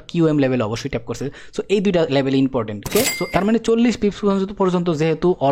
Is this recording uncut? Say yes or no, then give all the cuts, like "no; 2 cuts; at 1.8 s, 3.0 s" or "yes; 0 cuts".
no; 1 cut; at 2.8 s